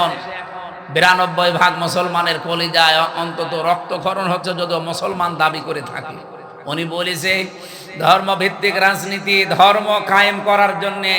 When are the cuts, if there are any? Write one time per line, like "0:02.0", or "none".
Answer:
none